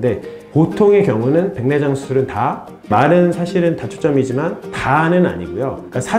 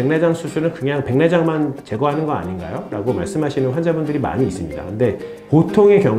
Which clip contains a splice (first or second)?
first